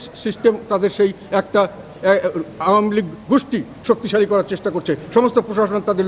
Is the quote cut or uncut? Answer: uncut